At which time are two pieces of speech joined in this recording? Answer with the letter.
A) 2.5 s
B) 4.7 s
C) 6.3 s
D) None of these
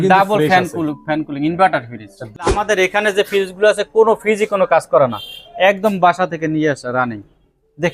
A